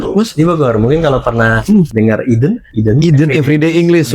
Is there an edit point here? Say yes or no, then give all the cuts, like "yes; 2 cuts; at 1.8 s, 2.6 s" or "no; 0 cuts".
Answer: yes; 2 cuts; at 1.9 s, 2.7 s